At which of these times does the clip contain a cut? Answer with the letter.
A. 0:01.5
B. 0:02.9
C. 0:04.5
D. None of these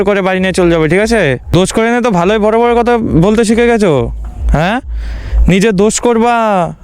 A